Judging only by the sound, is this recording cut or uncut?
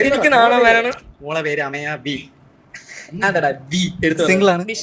uncut